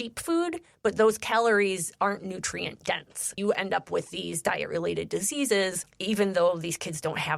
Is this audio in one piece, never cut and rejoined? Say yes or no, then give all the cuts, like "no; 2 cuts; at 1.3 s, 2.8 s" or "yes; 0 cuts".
no; 2 cuts; at 3.4 s, 5.9 s